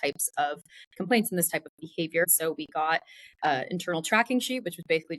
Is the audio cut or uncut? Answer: cut